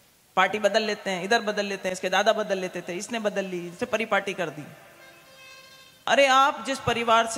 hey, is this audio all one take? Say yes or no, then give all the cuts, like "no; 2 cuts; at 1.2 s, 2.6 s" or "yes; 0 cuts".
yes; 0 cuts